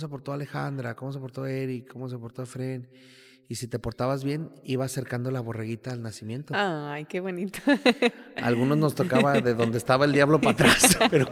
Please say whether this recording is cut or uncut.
uncut